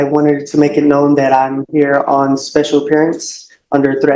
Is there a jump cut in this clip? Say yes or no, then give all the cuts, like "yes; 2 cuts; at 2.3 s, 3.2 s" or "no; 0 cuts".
no; 0 cuts